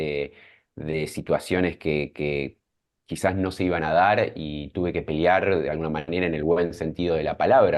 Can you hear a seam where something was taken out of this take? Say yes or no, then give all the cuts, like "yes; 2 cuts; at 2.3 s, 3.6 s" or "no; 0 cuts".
no; 0 cuts